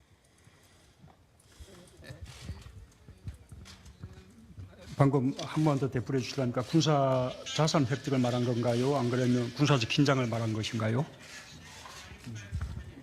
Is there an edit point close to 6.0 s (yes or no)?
yes